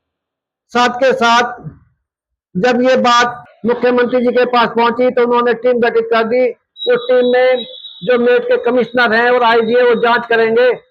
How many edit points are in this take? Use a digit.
1